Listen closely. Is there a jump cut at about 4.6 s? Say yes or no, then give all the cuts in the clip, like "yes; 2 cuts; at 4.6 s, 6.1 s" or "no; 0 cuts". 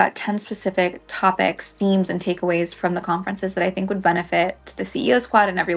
yes; 2 cuts; at 1.7 s, 4.6 s